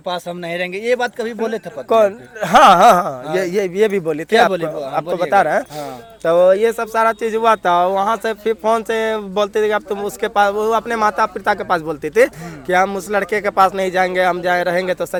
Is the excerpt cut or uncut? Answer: uncut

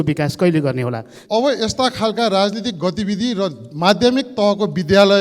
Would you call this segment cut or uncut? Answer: cut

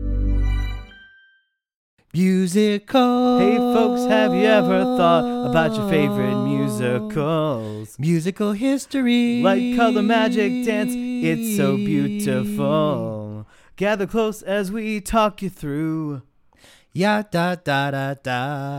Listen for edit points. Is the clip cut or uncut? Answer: cut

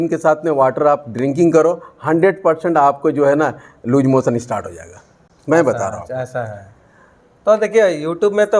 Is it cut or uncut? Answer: uncut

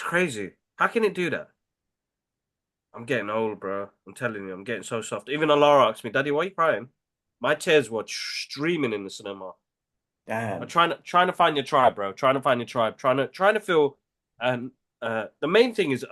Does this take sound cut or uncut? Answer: uncut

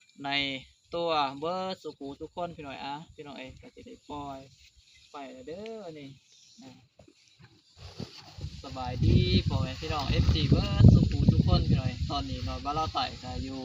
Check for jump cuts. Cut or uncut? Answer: cut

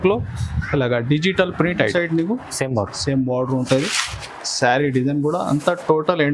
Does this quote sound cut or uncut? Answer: cut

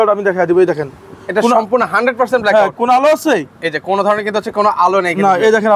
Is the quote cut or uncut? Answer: uncut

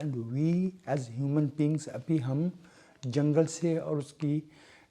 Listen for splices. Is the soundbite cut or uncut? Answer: uncut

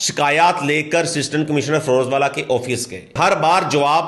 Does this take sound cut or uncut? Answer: cut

